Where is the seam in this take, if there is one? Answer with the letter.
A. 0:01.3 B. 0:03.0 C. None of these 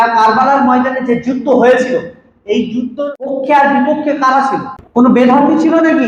B